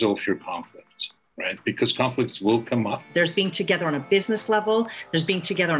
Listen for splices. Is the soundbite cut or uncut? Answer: cut